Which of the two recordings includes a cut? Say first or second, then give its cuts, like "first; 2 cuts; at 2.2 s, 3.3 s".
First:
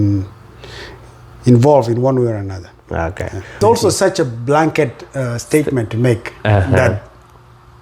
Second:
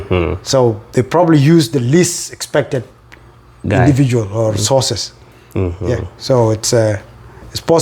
first; 1 cut; at 3.5 s